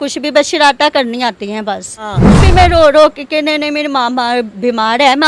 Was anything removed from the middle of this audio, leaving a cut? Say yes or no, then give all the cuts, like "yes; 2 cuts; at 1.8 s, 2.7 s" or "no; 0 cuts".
yes; 1 cut; at 2.2 s